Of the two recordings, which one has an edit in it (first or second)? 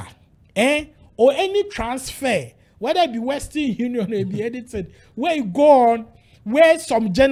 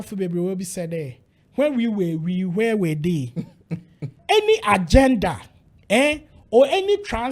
second